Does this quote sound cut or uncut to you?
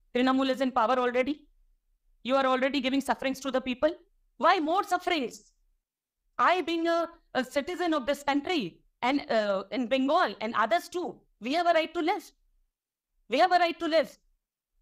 uncut